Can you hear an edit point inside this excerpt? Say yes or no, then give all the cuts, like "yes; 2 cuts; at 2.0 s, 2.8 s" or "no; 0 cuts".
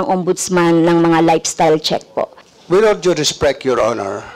yes; 1 cut; at 2.4 s